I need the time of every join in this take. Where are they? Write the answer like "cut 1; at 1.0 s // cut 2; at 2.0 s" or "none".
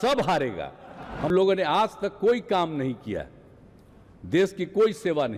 cut 1; at 1.3 s

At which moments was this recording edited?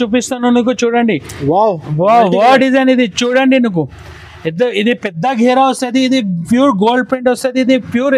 none

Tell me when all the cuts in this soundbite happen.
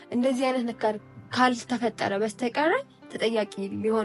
none

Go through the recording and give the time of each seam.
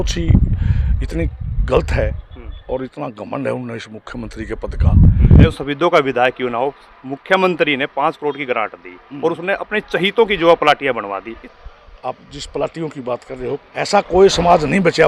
cut 1; at 5.6 s // cut 2; at 11.4 s // cut 3; at 13.6 s

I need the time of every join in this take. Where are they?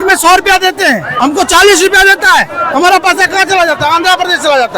cut 1; at 1.1 s

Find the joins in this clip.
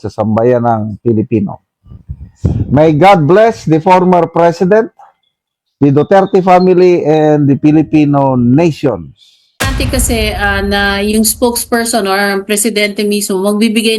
cut 1; at 9.7 s

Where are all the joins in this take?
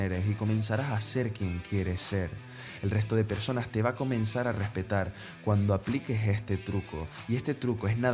cut 1; at 7.1 s

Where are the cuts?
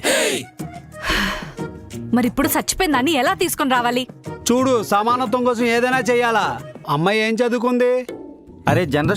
cut 1; at 6.9 s

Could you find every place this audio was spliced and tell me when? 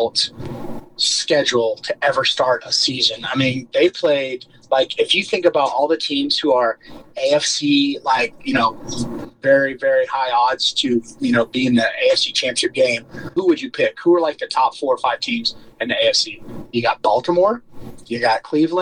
cut 1; at 13.3 s // cut 2; at 16.6 s

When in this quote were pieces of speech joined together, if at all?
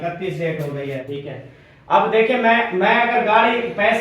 cut 1; at 1.1 s

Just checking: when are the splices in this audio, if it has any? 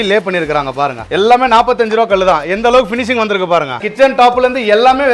cut 1; at 1.0 s // cut 2; at 3.9 s

